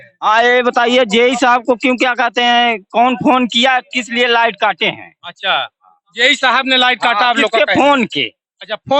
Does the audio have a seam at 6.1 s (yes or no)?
no